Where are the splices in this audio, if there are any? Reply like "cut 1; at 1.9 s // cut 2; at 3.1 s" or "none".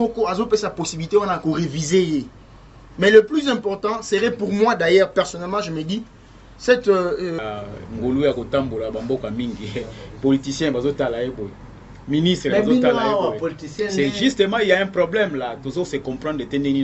cut 1; at 7.4 s